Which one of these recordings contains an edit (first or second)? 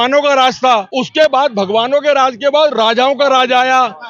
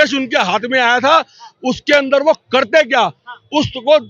first